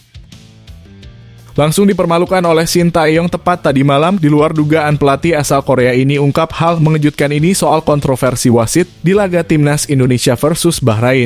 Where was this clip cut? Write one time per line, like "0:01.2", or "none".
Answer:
0:01.5